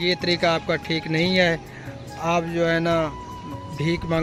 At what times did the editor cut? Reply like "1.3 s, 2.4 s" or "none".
none